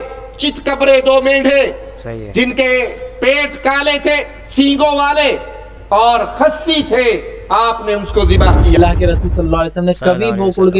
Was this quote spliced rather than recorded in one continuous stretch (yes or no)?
yes